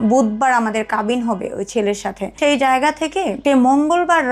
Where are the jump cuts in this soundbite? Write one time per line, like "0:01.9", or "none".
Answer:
0:02.3
0:03.4